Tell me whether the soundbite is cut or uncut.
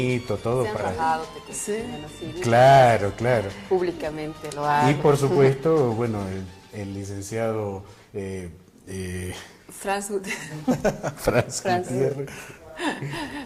uncut